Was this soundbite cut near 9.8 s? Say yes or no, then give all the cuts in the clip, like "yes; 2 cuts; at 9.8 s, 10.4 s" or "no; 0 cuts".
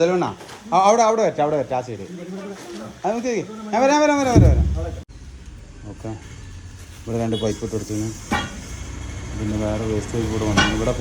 no; 1 cut; at 5.0 s